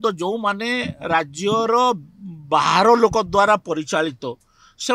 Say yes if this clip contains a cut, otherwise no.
no